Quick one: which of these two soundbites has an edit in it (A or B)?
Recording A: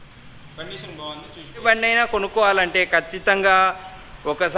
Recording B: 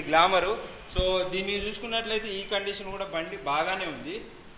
A